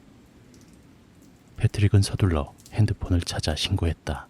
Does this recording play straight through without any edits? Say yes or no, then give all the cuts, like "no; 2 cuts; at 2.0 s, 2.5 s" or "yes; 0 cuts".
yes; 0 cuts